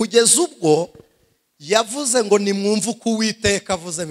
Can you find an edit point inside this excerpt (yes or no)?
no